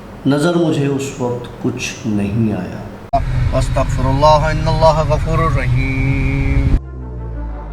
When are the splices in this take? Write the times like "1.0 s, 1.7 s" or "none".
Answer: 3.1 s